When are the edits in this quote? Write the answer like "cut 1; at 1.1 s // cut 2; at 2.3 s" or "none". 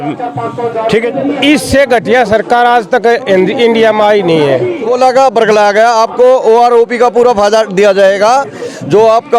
cut 1; at 1.1 s // cut 2; at 4.8 s